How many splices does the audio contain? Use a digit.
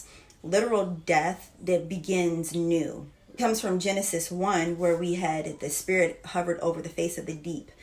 1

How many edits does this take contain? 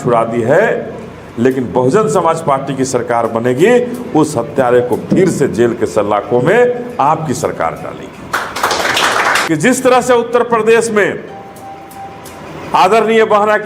1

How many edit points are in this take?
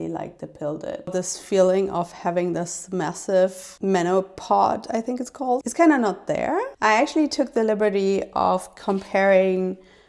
2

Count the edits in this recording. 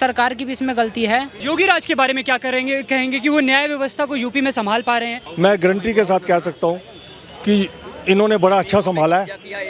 2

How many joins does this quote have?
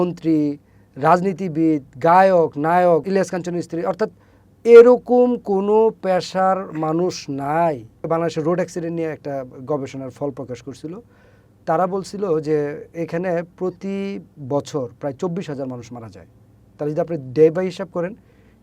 2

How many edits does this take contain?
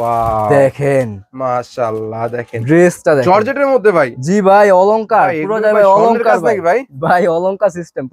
0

